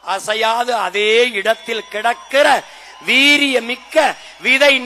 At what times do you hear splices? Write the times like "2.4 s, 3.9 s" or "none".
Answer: none